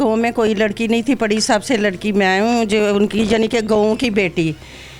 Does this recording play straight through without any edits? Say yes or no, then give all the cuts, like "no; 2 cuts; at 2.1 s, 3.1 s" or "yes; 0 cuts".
yes; 0 cuts